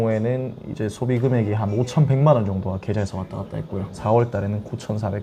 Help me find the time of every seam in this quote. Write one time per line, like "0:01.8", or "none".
0:04.0